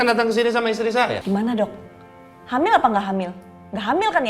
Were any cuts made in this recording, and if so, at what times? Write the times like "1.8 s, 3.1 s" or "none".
1.2 s